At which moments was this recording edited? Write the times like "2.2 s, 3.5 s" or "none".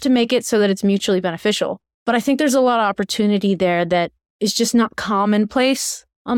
1.9 s, 4.2 s